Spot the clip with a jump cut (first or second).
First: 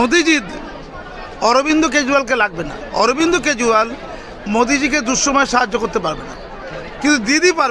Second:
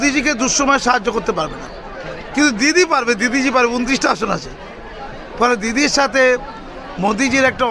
first